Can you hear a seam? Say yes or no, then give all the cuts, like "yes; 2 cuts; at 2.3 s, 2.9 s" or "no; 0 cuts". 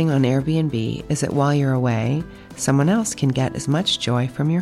no; 0 cuts